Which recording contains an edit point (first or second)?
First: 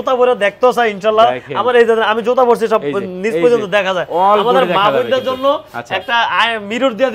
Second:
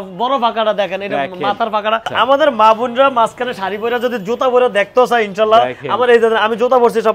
second